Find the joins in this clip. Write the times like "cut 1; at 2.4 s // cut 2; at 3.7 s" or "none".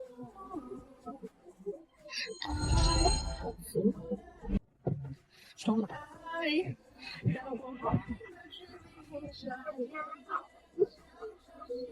cut 1; at 4.6 s